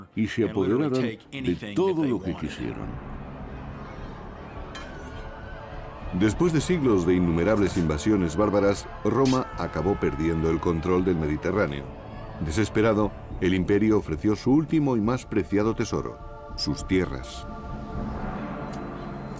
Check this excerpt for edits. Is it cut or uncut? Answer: cut